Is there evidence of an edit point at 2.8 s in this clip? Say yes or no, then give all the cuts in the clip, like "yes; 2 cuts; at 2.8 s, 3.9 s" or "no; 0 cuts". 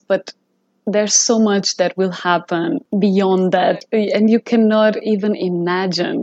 yes; 2 cuts; at 2.8 s, 3.8 s